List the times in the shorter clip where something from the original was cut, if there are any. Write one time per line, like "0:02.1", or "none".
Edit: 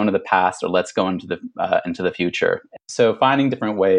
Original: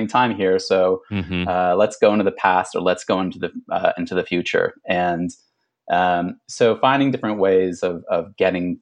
0:02.7